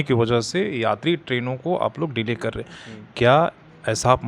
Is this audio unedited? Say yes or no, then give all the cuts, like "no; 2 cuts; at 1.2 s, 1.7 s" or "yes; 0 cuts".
yes; 0 cuts